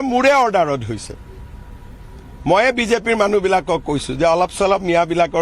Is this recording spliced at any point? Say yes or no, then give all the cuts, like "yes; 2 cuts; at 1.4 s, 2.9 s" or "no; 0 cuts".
yes; 1 cut; at 2.8 s